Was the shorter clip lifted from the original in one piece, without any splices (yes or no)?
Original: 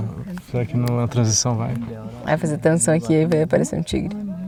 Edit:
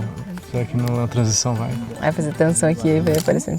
no